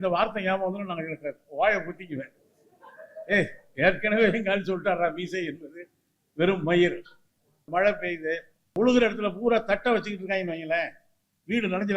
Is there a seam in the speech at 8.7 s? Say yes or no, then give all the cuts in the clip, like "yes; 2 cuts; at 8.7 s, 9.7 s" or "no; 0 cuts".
yes; 2 cuts; at 7.7 s, 8.7 s